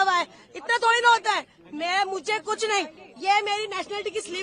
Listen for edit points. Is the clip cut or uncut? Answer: uncut